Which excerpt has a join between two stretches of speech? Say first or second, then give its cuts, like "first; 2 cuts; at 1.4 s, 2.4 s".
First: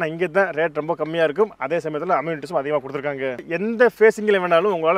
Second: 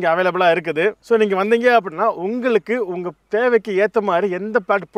first; 1 cut; at 3.4 s